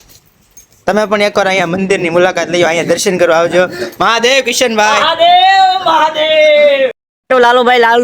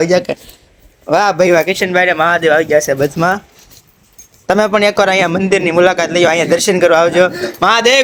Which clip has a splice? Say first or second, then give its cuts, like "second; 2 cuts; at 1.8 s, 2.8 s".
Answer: first; 1 cut; at 7.0 s